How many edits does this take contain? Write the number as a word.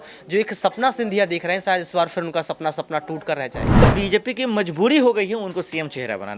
one